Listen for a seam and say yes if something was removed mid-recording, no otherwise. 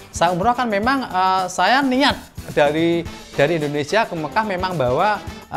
no